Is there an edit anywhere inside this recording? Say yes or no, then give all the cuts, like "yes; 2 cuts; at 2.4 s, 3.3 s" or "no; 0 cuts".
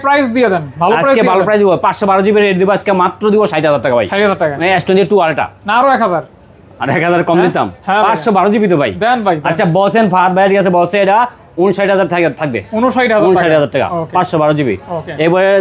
no; 0 cuts